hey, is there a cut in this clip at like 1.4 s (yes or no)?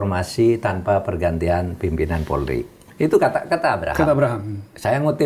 no